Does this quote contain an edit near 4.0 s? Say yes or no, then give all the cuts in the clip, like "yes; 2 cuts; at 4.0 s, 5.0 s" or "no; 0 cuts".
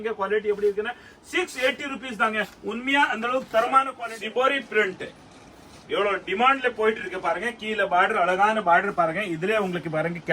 yes; 1 cut; at 4.0 s